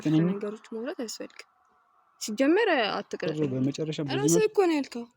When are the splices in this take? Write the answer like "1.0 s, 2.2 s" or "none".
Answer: 3.4 s